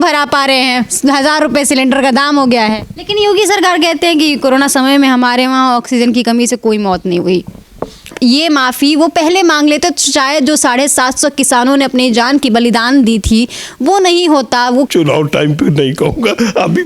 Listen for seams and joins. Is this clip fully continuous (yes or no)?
no